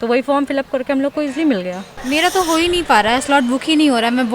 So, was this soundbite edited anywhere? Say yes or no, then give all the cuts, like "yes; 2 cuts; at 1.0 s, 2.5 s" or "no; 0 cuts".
yes; 1 cut; at 1.9 s